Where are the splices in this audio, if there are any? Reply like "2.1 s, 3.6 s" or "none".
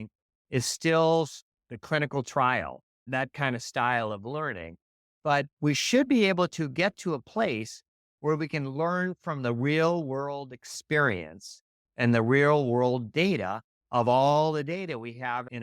3.1 s